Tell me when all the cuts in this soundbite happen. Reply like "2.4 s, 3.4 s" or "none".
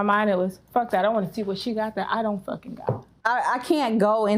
3.1 s